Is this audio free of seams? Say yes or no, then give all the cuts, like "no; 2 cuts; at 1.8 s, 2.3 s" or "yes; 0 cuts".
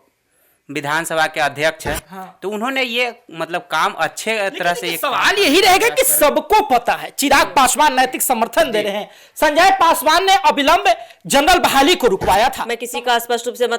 no; 1 cut; at 12.7 s